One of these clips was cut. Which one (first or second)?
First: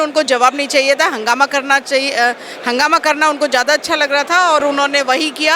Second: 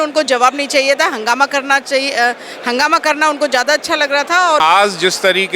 second